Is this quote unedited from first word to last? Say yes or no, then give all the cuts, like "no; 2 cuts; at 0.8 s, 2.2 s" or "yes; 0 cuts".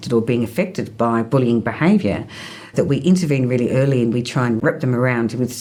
yes; 0 cuts